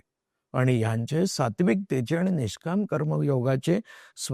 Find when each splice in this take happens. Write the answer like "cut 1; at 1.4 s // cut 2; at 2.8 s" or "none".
none